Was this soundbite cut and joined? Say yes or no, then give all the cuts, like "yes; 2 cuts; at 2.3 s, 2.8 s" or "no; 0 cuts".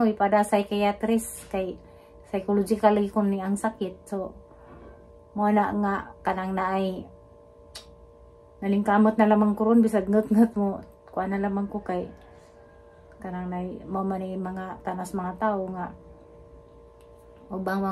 no; 0 cuts